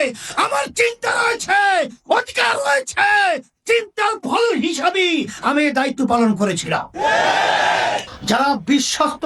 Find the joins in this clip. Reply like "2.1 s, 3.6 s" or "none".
8.1 s